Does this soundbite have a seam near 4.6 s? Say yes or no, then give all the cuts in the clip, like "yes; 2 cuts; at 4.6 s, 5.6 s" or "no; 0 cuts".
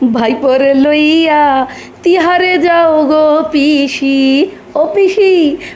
no; 0 cuts